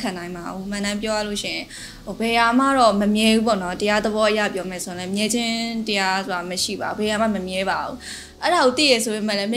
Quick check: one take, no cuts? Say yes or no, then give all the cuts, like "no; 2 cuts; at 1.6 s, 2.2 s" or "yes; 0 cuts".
yes; 0 cuts